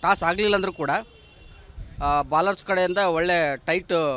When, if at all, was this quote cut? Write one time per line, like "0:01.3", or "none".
none